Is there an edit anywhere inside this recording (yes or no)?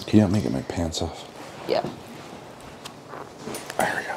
no